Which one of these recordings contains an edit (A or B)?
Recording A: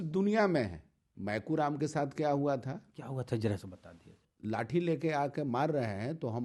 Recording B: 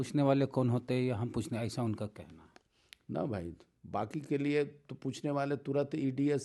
A